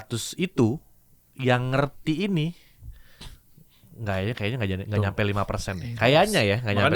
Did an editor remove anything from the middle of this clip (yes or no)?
no